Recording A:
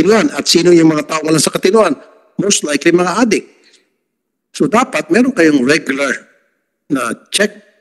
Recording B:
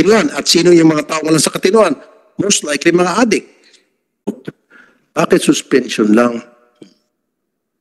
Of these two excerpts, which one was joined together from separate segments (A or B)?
B